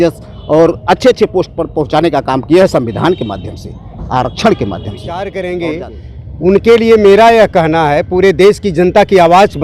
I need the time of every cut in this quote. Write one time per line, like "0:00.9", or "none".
0:05.1